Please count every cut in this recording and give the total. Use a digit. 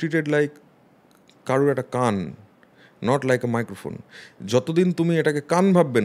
0